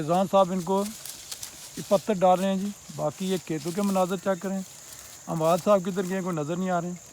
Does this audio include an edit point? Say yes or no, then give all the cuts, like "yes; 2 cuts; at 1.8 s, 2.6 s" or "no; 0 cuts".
no; 0 cuts